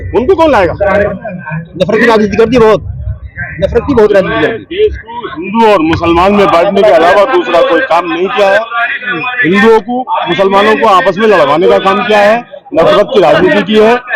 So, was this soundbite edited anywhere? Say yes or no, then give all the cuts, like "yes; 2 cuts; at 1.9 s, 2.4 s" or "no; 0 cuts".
yes; 1 cut; at 1.1 s